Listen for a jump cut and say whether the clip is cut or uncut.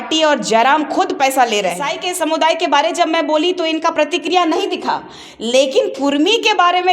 cut